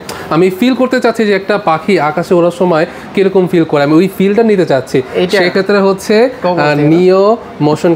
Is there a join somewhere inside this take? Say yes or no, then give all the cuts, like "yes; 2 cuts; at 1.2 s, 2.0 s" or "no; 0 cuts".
no; 0 cuts